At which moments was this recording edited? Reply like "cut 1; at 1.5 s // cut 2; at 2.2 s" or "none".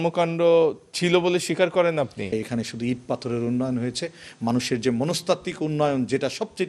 cut 1; at 2.3 s